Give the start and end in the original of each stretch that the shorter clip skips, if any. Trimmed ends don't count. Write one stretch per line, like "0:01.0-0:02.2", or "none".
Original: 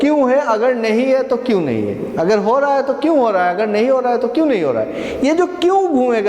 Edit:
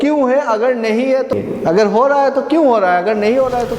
0:01.3-0:01.9